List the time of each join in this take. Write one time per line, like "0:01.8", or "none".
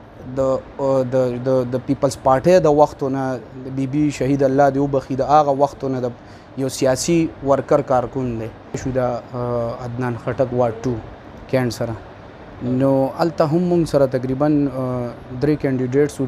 0:08.8